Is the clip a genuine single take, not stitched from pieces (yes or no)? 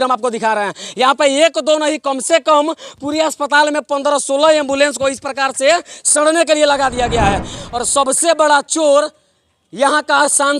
no